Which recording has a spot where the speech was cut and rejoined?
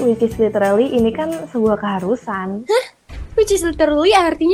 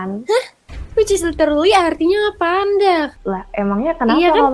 second; 1 cut; at 3.1 s

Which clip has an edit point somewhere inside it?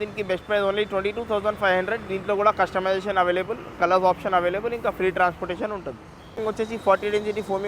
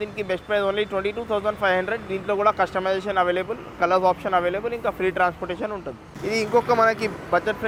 first; 1 cut; at 6.3 s

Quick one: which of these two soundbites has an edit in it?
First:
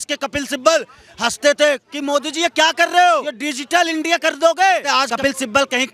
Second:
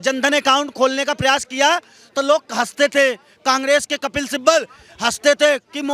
first; 2 cuts; at 3.4 s, 4.8 s

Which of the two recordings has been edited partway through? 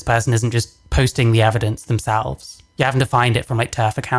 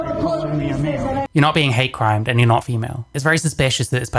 second; 2 cuts; at 1.3 s, 3.1 s

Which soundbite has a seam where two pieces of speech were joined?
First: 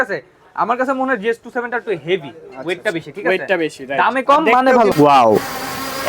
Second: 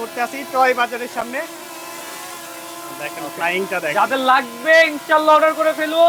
first; 1 cut; at 4.9 s

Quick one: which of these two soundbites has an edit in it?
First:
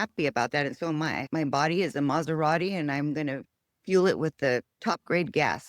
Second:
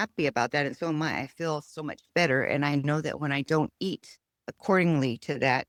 first; 1 cut; at 1.2 s

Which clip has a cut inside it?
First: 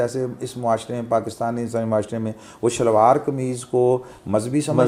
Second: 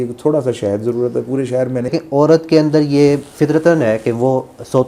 second; 1 cut; at 1.9 s

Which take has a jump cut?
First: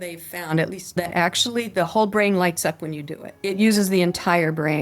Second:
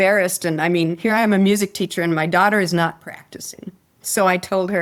first; 1 cut; at 1.0 s

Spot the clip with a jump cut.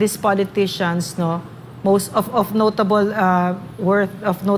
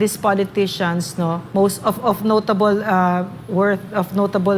second; 1 cut; at 1.4 s

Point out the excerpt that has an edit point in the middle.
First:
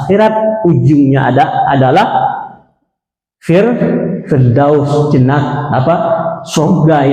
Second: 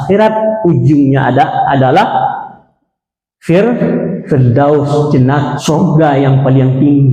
second; 1 cut; at 5.6 s

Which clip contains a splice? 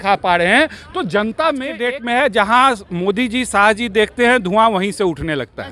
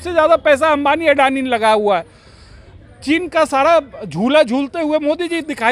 first; 1 cut; at 1.7 s

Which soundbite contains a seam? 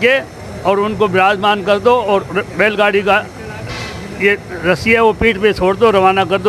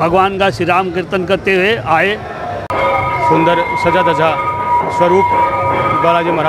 second; 1 cut; at 2.6 s

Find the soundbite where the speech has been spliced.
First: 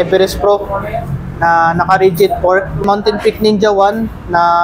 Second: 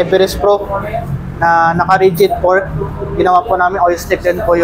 first; 1 cut; at 2.8 s

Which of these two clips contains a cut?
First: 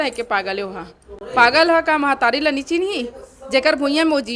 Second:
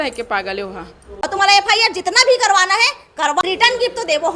second; 2 cuts; at 1.0 s, 3.4 s

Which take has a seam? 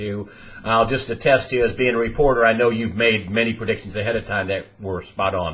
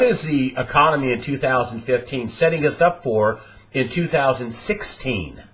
first; 1 cut; at 4.3 s

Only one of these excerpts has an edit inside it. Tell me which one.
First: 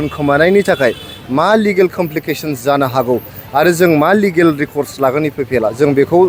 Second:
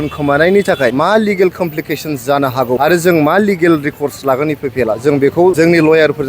second; 3 cuts; at 0.9 s, 2.8 s, 5.5 s

